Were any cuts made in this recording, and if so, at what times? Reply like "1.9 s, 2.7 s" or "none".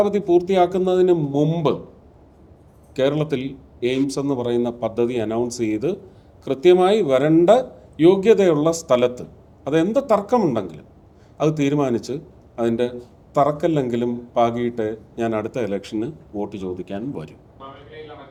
none